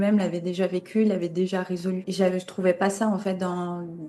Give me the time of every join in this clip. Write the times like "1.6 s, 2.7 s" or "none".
2.1 s